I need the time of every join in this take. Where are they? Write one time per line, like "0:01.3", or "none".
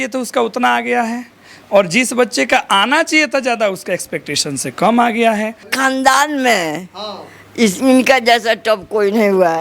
0:05.7